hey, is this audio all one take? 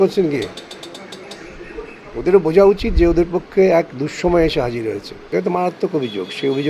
no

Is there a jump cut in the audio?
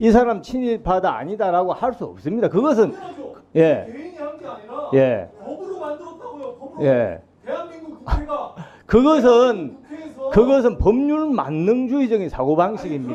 no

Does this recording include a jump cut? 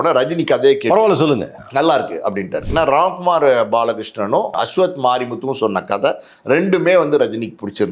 yes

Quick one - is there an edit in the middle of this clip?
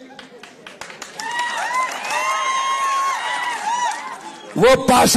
no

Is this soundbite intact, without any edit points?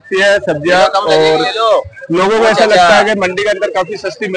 yes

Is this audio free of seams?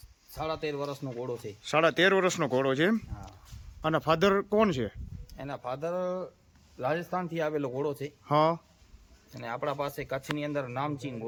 yes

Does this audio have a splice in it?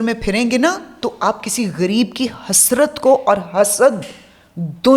no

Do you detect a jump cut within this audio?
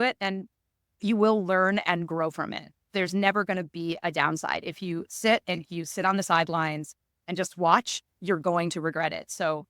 yes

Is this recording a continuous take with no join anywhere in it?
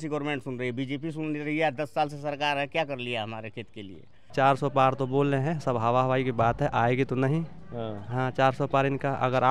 no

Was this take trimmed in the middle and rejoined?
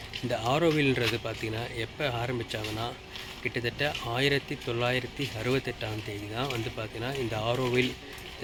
no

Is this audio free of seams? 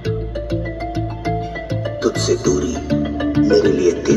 yes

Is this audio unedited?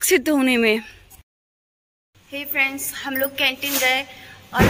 yes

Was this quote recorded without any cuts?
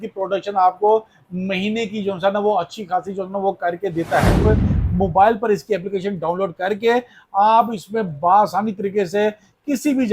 no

